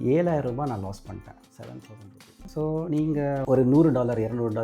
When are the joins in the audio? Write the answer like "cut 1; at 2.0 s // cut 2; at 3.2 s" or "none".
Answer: cut 1; at 2.4 s

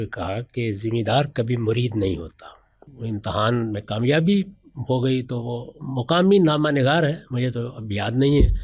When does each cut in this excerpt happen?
cut 1; at 2.9 s

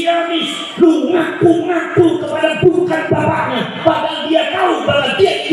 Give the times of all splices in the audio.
none

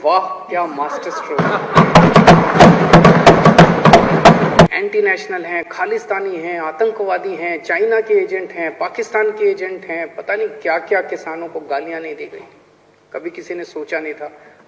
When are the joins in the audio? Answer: cut 1; at 4.7 s

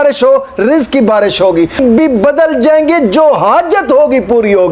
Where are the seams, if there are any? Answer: cut 1; at 1.8 s

